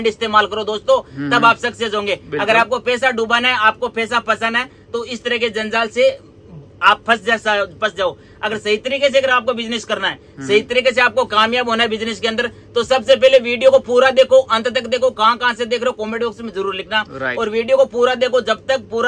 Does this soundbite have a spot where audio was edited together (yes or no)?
no